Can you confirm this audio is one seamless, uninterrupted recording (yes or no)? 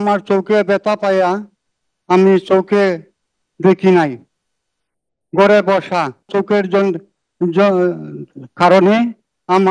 no